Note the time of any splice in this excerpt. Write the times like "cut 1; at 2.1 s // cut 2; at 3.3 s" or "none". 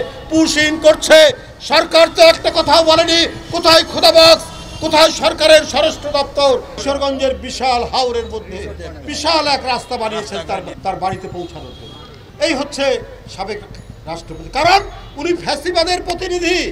cut 1; at 6.7 s // cut 2; at 10.7 s